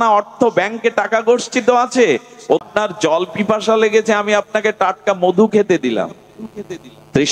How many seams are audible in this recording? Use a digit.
1